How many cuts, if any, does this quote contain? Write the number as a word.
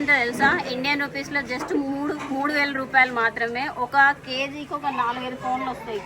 zero